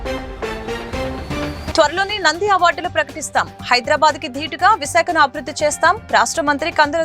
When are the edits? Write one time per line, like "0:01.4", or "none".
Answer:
0:01.3